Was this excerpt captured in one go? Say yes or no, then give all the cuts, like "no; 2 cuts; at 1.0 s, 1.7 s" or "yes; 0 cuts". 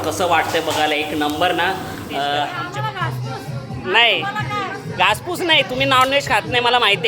no; 1 cut; at 2.6 s